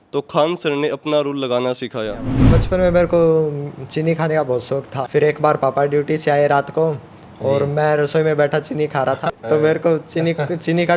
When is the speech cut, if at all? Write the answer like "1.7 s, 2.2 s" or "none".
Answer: 2.6 s, 4.9 s, 9.3 s